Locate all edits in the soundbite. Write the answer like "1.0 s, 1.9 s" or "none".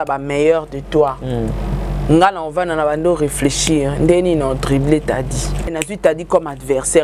5.7 s